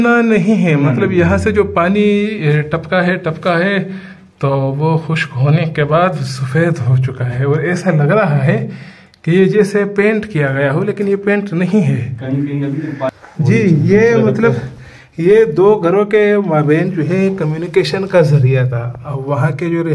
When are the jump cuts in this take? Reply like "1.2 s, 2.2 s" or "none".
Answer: 13.1 s